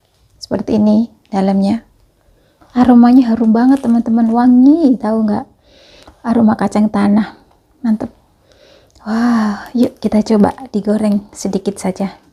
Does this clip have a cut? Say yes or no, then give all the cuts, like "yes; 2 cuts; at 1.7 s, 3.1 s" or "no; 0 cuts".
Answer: no; 0 cuts